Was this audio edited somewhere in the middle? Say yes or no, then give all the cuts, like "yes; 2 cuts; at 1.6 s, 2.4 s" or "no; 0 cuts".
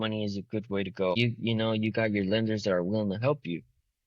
yes; 1 cut; at 1.2 s